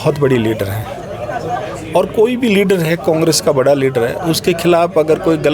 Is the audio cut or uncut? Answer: uncut